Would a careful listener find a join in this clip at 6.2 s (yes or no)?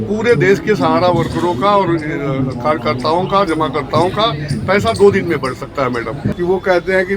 yes